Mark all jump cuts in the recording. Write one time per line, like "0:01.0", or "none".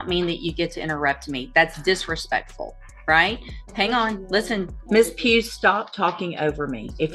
0:04.8